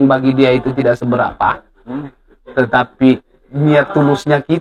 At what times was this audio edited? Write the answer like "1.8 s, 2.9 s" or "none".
none